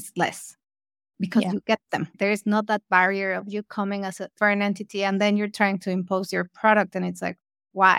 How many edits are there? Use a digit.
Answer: 2